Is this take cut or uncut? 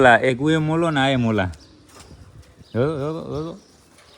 uncut